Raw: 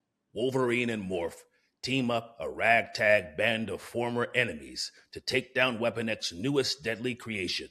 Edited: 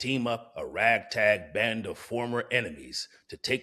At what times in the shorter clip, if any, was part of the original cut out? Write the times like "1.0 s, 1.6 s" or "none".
none